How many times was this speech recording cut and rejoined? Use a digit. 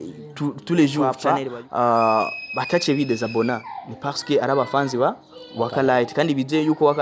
1